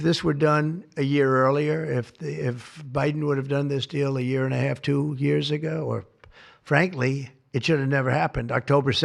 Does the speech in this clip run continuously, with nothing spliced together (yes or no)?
yes